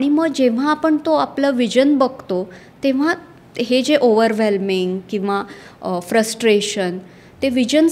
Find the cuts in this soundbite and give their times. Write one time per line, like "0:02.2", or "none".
none